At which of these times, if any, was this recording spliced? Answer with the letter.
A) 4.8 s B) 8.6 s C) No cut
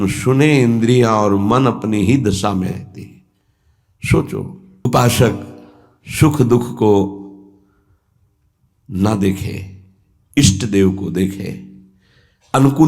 A